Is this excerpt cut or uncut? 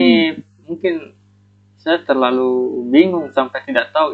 uncut